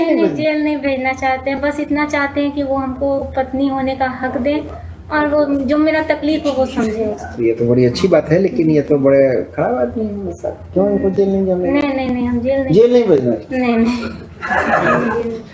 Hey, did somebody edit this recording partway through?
no; 0 cuts

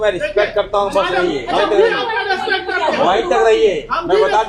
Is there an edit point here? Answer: no; 0 cuts

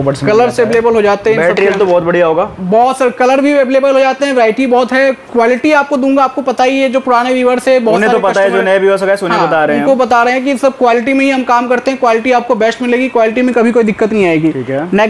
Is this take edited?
no; 0 cuts

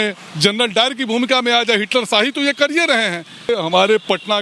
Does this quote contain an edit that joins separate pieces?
yes; 1 cut; at 3.5 s

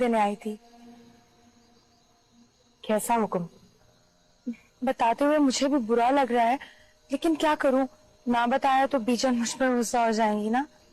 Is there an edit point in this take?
no; 0 cuts

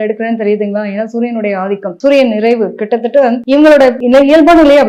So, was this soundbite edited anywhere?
no; 0 cuts

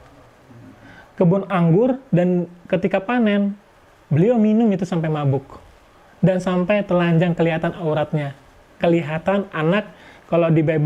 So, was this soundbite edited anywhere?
no; 0 cuts

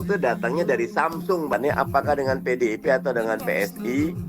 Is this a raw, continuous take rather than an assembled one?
no; 1 cut; at 1.5 s

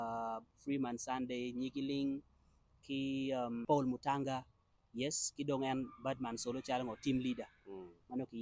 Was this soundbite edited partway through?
yes; 1 cut; at 3.6 s

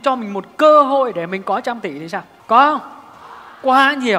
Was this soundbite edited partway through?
yes; 1 cut; at 2.3 s

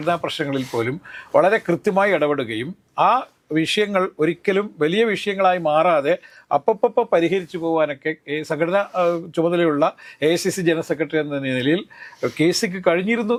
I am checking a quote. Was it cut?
no; 0 cuts

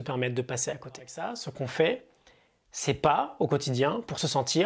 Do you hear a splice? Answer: yes; 1 cut; at 1.5 s

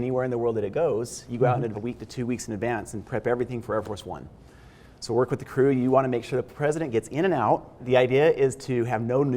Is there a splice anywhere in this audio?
yes; 2 cuts; at 1.7 s, 7.8 s

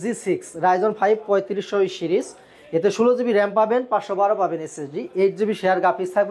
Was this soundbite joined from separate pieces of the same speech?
no; 0 cuts

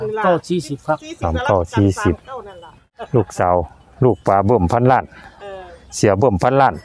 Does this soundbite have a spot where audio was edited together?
yes; 1 cut; at 3.0 s

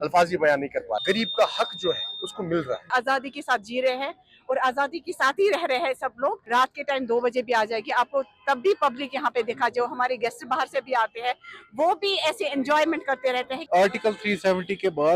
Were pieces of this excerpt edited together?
no; 0 cuts

